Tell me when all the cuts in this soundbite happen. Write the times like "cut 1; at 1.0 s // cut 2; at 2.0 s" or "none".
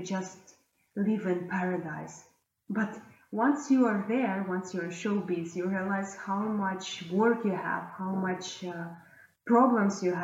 none

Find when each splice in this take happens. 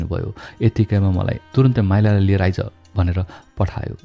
cut 1; at 1.4 s

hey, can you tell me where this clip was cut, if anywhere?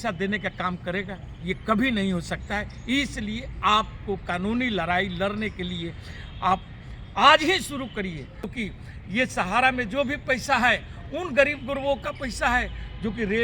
cut 1; at 8.5 s

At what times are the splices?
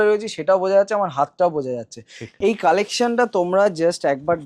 cut 1; at 2.2 s

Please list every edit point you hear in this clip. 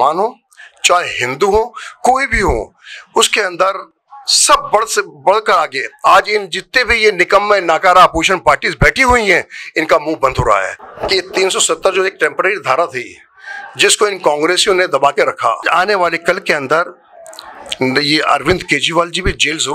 cut 1; at 5.8 s // cut 2; at 10.8 s // cut 3; at 15.6 s

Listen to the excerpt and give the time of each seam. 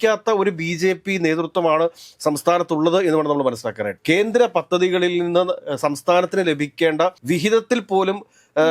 none

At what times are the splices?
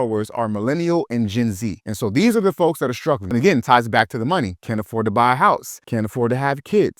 cut 1; at 3.2 s

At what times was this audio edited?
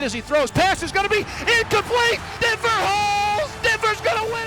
cut 1; at 2.3 s // cut 2; at 3.5 s

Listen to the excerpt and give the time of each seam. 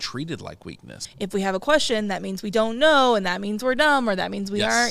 cut 1; at 1.0 s

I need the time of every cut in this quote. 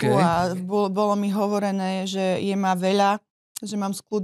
none

